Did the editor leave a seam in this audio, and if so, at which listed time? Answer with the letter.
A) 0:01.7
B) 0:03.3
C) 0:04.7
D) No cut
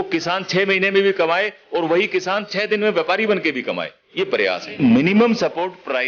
C